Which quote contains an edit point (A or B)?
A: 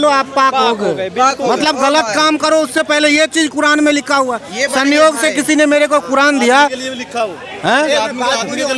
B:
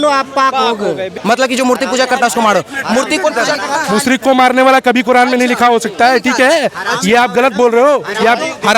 B